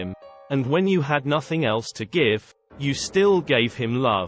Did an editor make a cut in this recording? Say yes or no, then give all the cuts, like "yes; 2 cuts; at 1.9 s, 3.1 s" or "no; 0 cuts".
no; 0 cuts